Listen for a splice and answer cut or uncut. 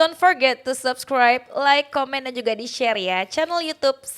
uncut